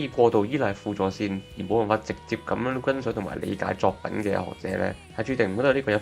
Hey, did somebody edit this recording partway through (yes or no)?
no